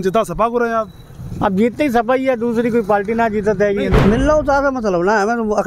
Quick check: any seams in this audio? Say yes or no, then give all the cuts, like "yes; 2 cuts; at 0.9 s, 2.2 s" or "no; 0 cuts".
yes; 1 cut; at 3.9 s